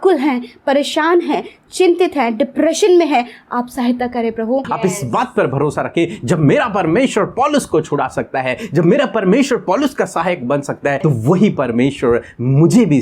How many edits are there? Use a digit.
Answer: 2